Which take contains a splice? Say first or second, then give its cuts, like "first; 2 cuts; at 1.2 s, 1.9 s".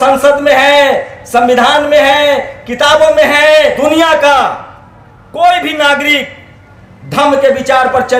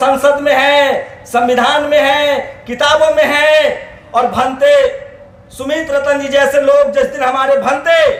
first; 1 cut; at 3.8 s